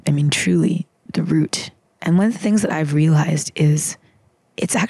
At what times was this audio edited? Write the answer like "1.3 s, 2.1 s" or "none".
none